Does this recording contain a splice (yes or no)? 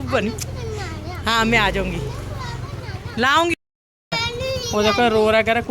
yes